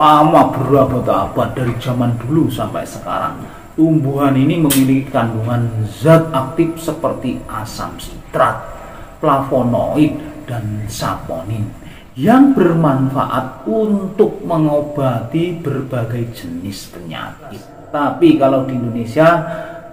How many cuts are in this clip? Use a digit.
1